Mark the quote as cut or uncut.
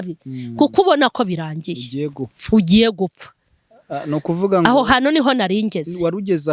uncut